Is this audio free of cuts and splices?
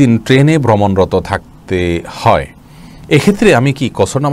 yes; 0 cuts

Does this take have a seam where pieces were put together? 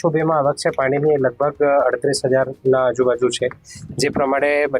no; 0 cuts

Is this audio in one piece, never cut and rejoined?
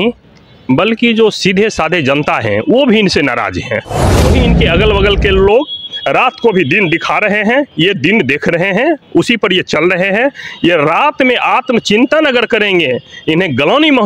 no; 1 cut; at 4.2 s

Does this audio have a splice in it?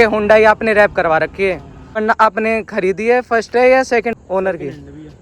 yes; 2 cuts; at 2.0 s, 4.1 s

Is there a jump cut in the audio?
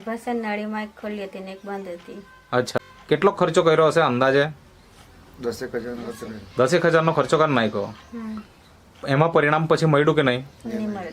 yes; 1 cut; at 2.8 s

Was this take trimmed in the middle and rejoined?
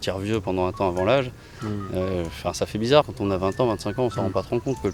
yes; 1 cut; at 3.1 s

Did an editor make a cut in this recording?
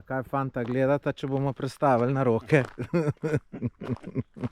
no; 0 cuts

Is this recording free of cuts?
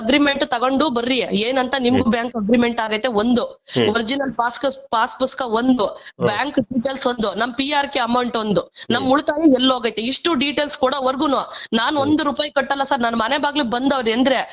yes; 0 cuts

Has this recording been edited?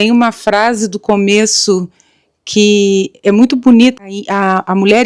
yes; 1 cut; at 4.0 s

